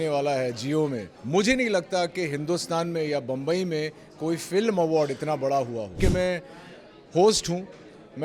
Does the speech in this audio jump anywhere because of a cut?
yes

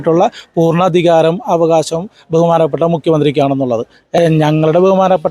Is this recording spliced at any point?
yes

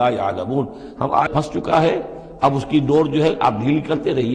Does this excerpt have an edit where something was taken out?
yes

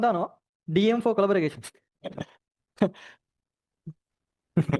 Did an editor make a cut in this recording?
no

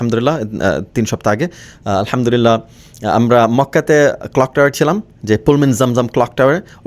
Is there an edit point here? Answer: no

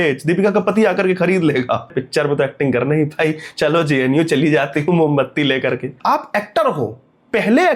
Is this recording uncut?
no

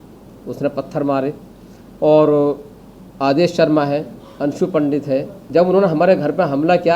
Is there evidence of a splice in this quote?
yes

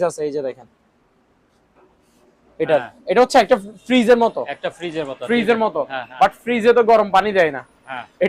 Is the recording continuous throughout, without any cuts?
yes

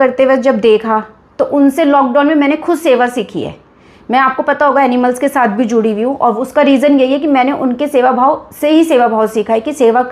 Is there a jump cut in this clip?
no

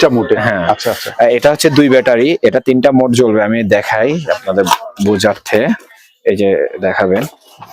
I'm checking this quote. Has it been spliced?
no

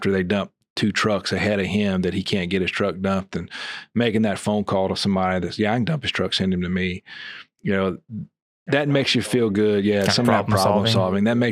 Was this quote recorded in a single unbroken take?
yes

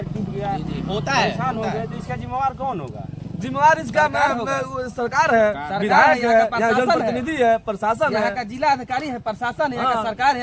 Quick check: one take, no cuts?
yes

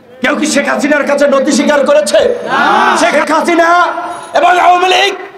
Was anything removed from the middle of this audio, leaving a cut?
yes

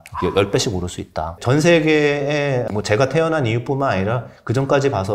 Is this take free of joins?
no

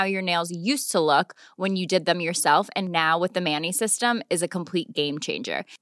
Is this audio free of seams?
yes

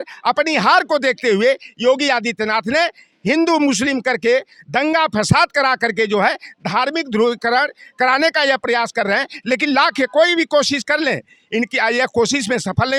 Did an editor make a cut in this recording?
no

